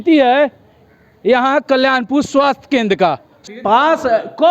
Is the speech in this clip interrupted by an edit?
yes; 1 cut; at 3.3 s

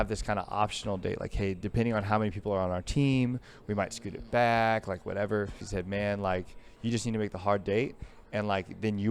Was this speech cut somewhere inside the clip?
yes; 1 cut; at 5.6 s

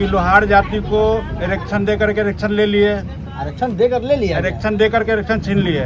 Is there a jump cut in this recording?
no; 0 cuts

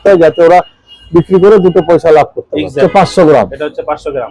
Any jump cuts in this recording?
yes; 1 cut; at 2.8 s

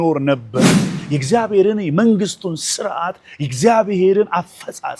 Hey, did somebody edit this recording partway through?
yes; 1 cut; at 1.0 s

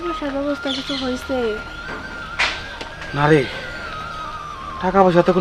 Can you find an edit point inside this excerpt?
no; 0 cuts

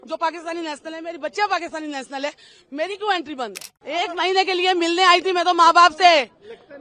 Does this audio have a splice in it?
yes; 1 cut; at 3.7 s

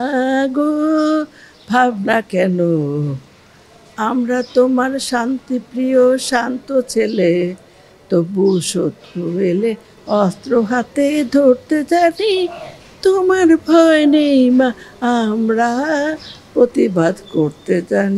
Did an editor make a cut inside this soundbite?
no; 0 cuts

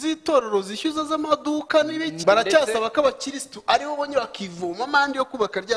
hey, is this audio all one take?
no; 1 cut; at 2.2 s

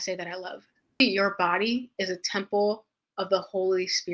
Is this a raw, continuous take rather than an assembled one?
no; 1 cut; at 1.0 s

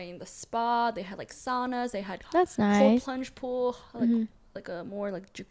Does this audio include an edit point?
no; 0 cuts

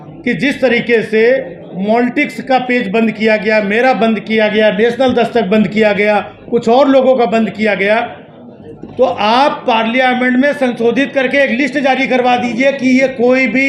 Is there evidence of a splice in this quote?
no; 0 cuts

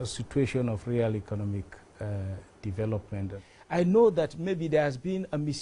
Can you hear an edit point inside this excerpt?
yes; 1 cut; at 2.0 s

